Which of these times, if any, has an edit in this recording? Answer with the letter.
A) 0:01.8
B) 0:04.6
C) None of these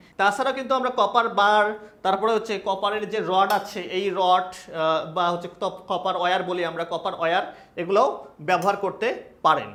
C